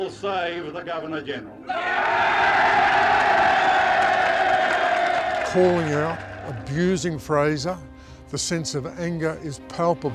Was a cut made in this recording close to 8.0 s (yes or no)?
no